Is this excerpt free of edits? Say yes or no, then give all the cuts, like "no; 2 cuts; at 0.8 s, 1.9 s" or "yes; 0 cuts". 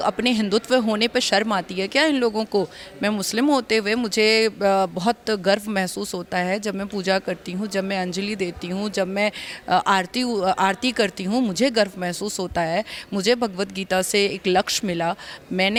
yes; 0 cuts